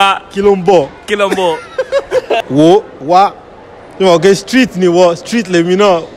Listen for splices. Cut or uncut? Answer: cut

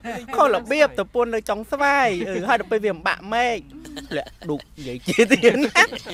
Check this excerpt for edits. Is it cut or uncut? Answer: uncut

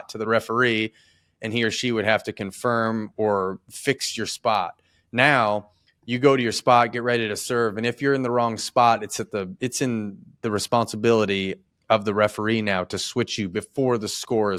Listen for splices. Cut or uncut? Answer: uncut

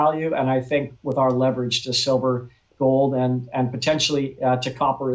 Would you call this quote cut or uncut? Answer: uncut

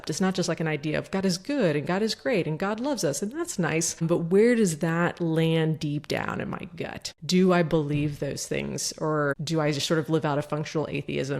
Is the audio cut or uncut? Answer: uncut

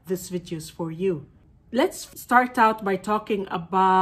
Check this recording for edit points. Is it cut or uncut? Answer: cut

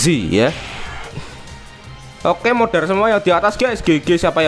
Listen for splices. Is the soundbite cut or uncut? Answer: cut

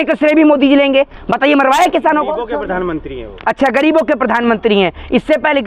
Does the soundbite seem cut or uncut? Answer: cut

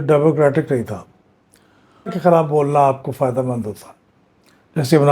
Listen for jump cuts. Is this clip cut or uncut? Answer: cut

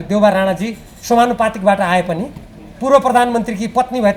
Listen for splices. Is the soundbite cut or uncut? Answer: uncut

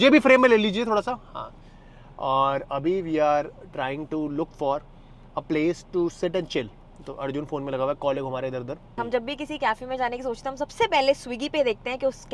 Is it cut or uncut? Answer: uncut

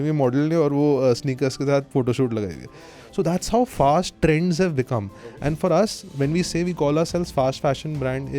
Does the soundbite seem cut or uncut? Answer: cut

